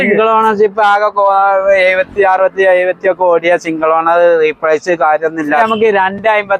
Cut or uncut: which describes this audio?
cut